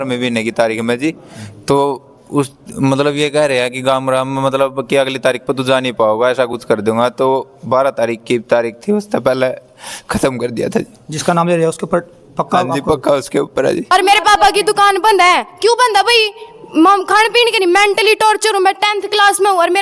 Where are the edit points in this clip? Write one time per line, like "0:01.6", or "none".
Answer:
0:13.9